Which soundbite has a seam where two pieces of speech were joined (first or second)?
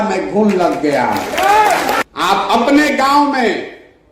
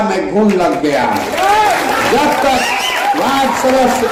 first